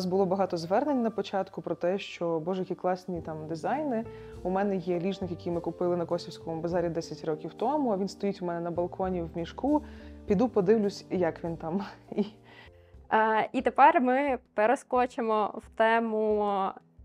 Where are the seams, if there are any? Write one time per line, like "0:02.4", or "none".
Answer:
none